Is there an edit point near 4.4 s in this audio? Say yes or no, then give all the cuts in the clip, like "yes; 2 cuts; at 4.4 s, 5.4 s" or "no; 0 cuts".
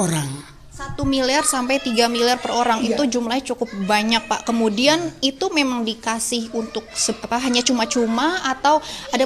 no; 0 cuts